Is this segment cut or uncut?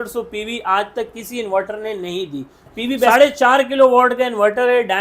cut